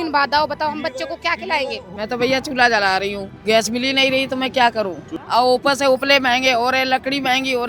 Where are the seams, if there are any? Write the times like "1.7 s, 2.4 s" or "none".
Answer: 1.9 s, 5.1 s